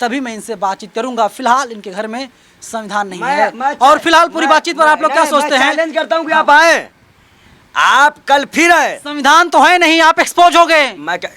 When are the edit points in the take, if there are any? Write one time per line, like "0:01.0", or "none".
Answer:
none